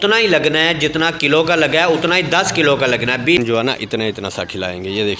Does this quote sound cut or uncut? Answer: cut